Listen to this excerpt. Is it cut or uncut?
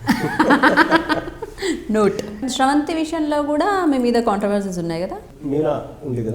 cut